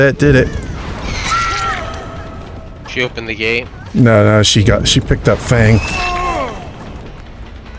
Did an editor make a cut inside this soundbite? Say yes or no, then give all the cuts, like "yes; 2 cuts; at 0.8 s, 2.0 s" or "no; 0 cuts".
no; 0 cuts